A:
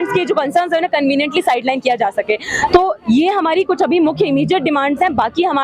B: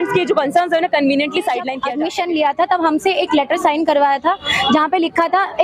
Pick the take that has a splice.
B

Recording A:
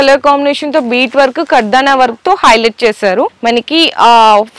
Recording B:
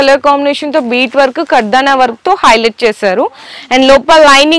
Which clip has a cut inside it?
A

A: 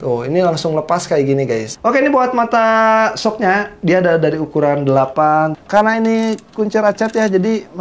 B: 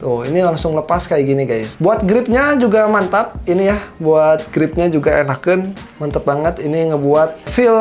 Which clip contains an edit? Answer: A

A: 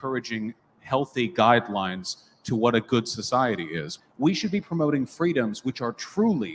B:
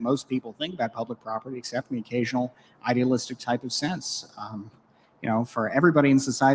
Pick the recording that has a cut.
A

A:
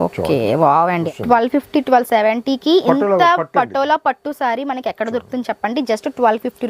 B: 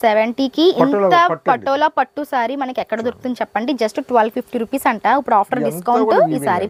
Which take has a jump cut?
A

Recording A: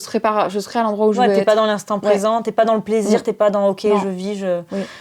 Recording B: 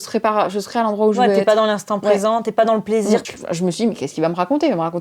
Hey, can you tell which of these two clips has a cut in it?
B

